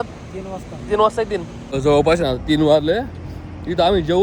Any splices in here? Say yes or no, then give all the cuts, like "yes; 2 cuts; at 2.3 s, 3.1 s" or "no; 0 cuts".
yes; 1 cut; at 1.6 s